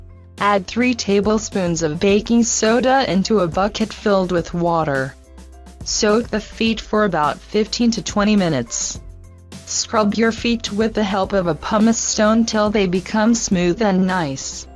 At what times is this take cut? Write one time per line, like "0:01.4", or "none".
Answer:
0:03.7

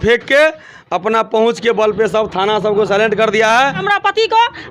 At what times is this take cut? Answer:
0:03.8

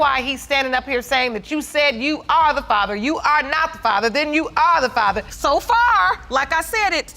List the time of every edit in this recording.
0:05.2

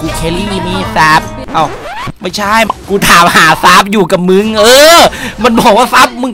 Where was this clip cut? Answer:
0:02.7

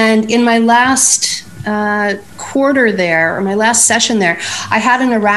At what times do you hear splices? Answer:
0:01.9

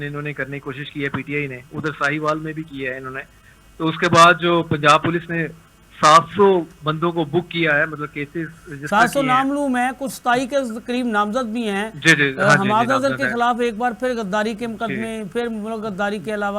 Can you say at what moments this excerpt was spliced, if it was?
none

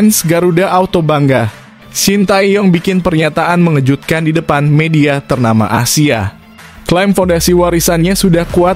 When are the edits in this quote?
none

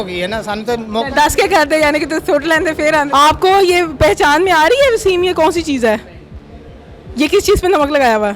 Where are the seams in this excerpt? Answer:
0:03.1

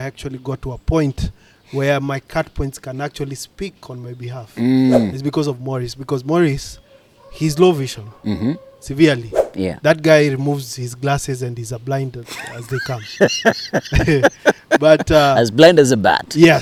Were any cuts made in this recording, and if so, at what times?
none

